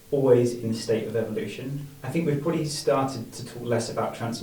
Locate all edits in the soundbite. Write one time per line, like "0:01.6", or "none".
none